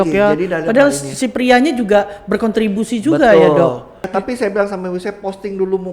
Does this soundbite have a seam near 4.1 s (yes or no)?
yes